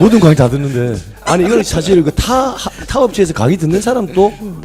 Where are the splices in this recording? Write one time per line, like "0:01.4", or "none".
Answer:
0:01.2

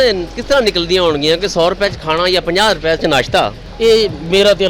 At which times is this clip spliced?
0:03.6

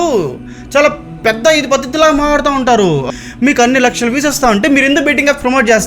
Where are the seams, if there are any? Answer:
0:03.1

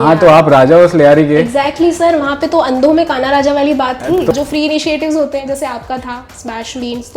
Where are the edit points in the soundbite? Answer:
0:04.3

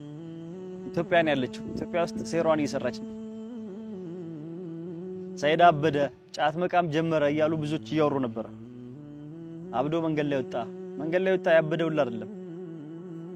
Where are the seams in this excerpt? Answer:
none

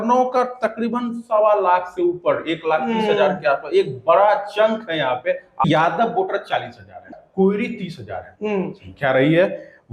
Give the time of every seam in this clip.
0:05.6
0:07.2

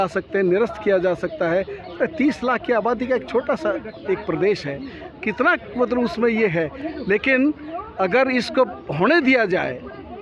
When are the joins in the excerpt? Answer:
none

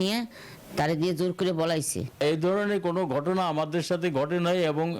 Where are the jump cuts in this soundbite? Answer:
0:02.2

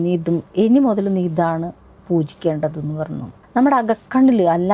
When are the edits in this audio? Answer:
0:03.3

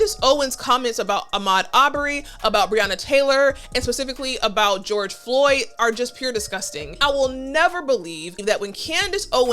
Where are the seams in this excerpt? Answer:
0:06.9
0:08.3

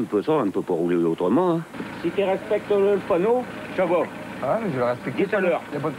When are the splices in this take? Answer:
0:01.8

